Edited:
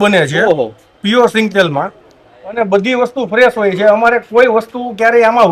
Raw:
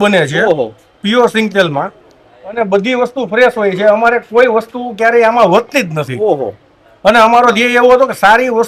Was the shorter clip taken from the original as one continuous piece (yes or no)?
yes